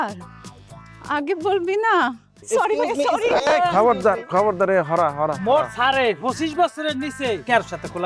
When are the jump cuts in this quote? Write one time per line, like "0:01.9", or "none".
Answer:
0:02.3